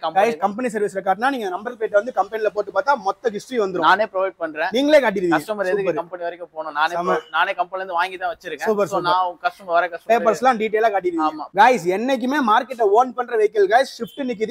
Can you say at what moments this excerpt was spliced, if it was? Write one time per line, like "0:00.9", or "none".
0:11.4